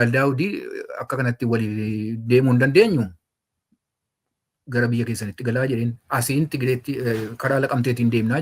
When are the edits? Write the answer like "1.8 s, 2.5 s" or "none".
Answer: none

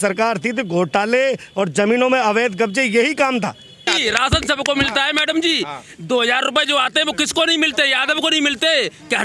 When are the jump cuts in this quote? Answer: 3.9 s

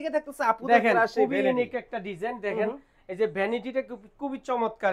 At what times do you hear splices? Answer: none

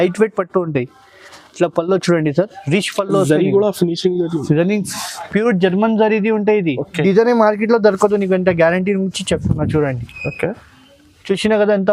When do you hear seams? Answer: 7.0 s

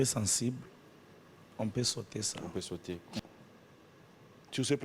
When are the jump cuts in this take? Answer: 3.2 s

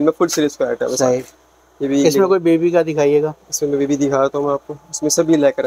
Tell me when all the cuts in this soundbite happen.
none

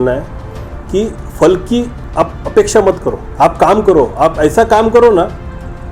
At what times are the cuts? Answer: 2.0 s, 3.2 s

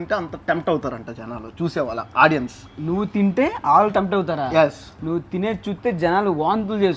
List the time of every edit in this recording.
none

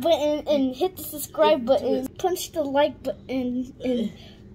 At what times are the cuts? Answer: 2.1 s

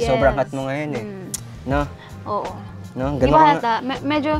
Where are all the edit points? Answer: none

